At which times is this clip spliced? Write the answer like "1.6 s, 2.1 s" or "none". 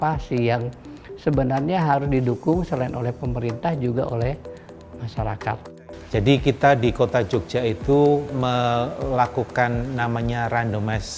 5.8 s